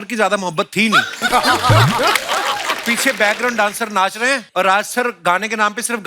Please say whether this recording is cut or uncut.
cut